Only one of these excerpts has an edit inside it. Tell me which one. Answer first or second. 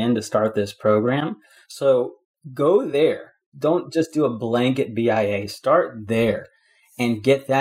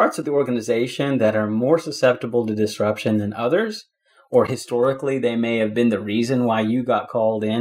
first